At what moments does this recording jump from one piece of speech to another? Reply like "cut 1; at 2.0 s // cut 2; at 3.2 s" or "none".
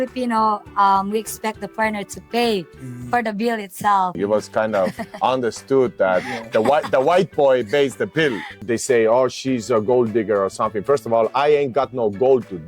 cut 1; at 4.2 s // cut 2; at 8.5 s

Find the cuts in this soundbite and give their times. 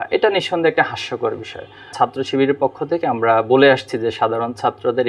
cut 1; at 1.9 s

